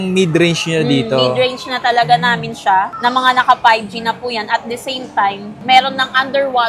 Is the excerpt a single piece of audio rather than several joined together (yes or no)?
yes